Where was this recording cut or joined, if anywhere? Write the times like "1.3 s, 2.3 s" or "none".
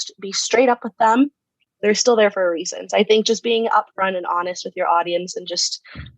1.6 s